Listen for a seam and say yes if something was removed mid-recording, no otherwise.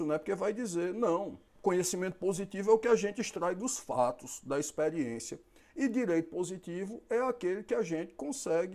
yes